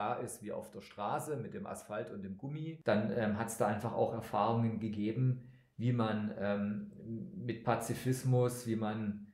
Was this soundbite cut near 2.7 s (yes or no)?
yes